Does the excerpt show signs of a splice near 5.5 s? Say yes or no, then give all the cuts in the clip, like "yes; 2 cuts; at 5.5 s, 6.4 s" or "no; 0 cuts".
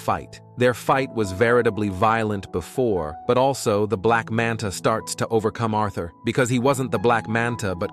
no; 0 cuts